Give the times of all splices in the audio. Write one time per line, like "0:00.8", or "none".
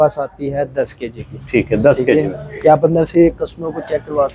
none

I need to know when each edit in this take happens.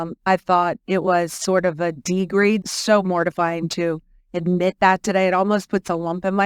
0:02.7

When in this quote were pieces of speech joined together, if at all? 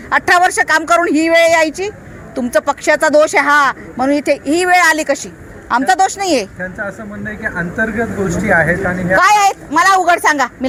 none

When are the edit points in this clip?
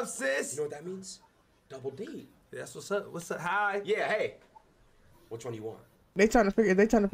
0:06.1

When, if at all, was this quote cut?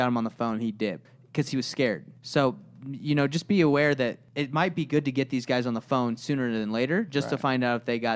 0:01.1
0:02.1
0:04.3

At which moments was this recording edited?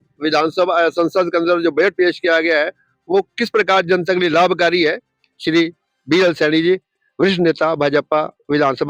none

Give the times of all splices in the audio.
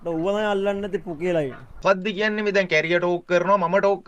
0:01.8

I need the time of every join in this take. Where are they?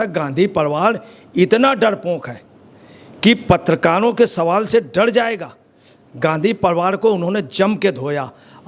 none

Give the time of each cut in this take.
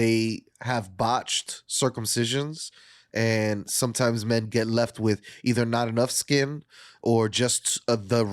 none

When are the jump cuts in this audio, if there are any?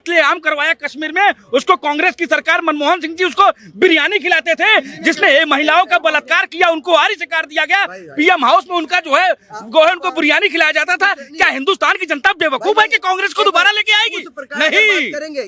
none

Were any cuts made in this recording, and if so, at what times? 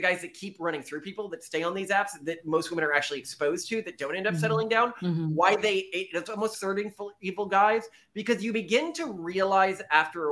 none

